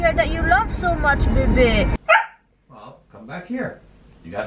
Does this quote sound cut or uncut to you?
cut